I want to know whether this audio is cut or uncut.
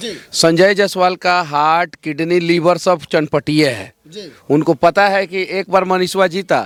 uncut